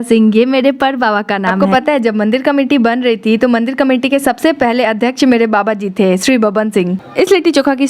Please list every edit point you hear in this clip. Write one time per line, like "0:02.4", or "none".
0:01.6
0:06.9